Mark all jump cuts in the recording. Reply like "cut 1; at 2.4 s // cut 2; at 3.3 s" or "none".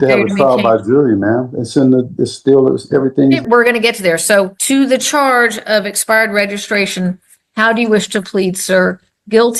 cut 1; at 3.4 s // cut 2; at 4.6 s